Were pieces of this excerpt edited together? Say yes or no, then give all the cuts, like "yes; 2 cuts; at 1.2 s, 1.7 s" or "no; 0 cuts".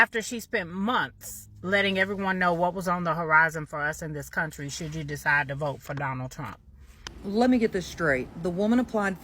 yes; 1 cut; at 7.1 s